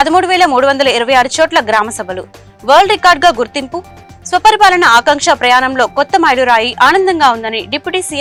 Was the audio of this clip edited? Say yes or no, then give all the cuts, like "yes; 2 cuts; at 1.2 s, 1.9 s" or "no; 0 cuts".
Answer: no; 0 cuts